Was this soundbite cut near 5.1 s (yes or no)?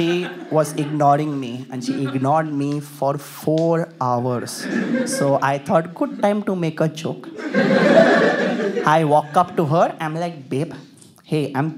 yes